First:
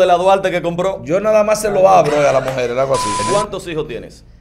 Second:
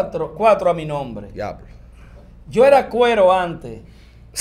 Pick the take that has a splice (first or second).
first